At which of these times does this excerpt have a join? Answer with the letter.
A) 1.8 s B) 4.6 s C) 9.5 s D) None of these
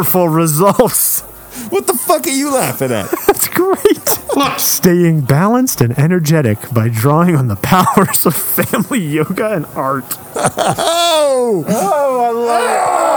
B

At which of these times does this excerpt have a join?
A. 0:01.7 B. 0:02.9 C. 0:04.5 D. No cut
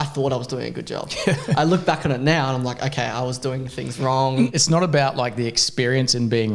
C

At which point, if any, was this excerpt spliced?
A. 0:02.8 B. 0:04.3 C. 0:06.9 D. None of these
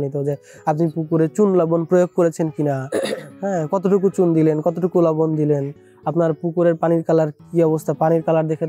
D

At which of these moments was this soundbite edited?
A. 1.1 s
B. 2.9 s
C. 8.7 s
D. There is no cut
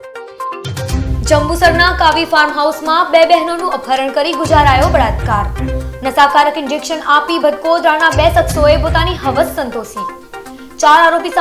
A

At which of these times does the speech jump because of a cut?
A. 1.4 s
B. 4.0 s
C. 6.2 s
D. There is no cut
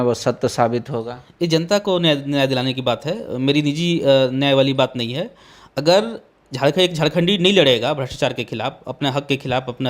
C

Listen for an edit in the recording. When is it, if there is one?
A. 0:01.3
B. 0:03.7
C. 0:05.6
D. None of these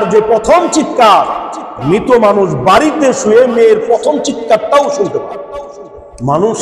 C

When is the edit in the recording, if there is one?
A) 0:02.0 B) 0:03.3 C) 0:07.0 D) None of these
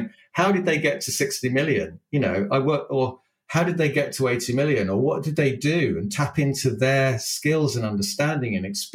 D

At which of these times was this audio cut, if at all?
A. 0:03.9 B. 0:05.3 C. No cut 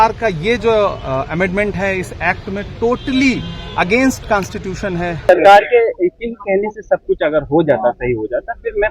B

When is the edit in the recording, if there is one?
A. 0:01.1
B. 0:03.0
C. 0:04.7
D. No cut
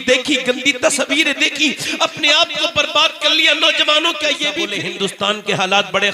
C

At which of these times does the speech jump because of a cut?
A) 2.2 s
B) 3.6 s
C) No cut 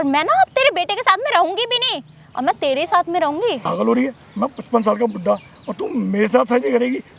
B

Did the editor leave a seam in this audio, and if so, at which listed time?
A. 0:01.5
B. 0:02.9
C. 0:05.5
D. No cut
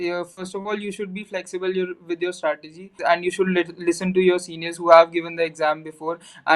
B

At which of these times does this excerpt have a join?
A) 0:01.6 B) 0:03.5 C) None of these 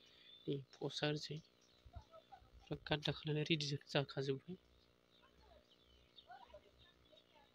C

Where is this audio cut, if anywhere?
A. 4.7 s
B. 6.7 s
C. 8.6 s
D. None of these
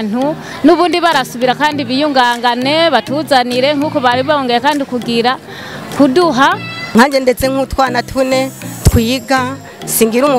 B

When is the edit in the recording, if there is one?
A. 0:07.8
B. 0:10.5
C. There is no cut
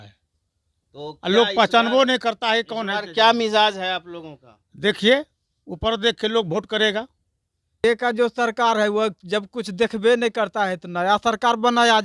A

